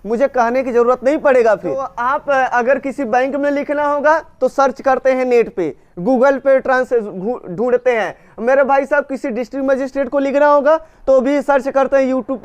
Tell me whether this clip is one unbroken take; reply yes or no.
no